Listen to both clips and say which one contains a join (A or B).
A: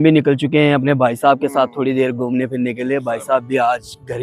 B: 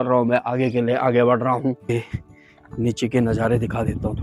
B